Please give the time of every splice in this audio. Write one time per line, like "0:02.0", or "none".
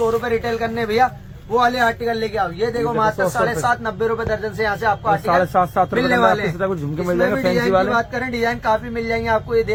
none